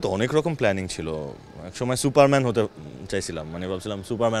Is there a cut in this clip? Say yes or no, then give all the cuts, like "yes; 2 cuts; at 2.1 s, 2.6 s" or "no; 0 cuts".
no; 0 cuts